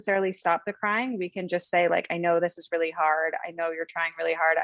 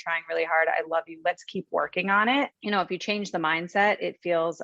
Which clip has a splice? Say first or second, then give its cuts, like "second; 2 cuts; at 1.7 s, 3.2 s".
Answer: second; 1 cut; at 2.6 s